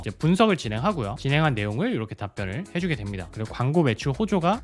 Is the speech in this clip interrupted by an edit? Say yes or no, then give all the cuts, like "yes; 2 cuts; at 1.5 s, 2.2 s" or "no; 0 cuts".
yes; 1 cut; at 3.3 s